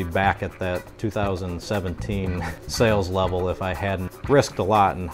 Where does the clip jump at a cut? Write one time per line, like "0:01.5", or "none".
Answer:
0:02.5
0:04.1